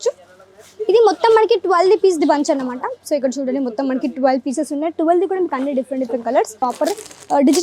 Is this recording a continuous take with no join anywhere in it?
no; 1 cut; at 6.6 s

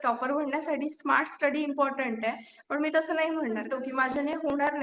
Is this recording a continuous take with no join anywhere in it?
no; 1 cut; at 3.6 s

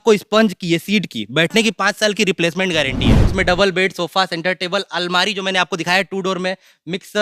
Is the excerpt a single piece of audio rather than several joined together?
no; 1 cut; at 3.2 s

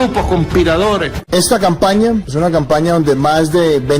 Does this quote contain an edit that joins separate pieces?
yes; 2 cuts; at 1.1 s, 2.3 s

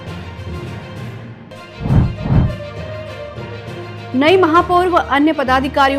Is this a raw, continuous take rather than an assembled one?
no; 1 cut; at 1.4 s

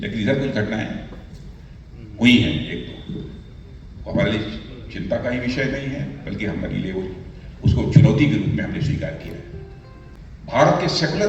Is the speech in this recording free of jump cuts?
no; 1 cut; at 10.0 s

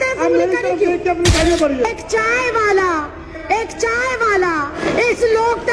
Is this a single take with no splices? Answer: no; 2 cuts; at 1.3 s, 4.8 s

